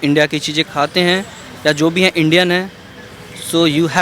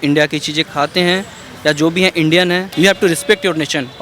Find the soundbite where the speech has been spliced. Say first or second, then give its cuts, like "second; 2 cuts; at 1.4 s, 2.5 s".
second; 1 cut; at 2.7 s